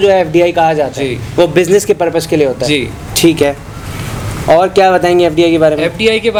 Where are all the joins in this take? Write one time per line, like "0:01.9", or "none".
none